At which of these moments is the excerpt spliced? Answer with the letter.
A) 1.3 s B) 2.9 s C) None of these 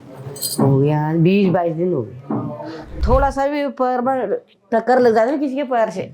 B